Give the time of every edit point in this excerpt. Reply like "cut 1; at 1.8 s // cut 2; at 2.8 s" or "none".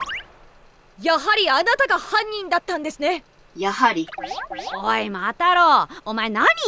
none